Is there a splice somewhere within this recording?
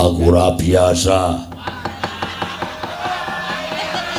no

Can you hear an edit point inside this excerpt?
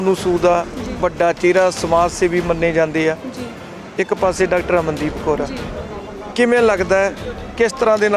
no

